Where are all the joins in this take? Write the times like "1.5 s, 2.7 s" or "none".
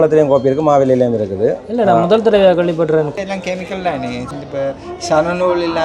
3.1 s, 4.3 s